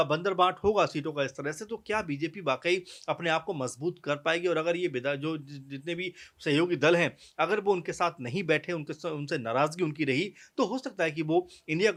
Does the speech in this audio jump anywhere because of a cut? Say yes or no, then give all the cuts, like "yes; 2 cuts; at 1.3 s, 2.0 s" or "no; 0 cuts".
no; 0 cuts